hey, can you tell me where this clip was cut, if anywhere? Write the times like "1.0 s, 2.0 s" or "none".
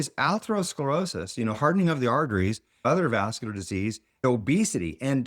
2.8 s, 4.2 s